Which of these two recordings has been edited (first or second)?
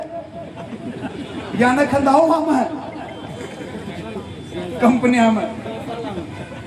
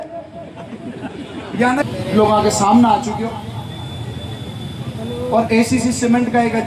second